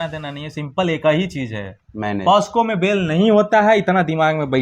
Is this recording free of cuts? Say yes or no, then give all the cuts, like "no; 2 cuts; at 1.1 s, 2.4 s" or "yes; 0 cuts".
yes; 0 cuts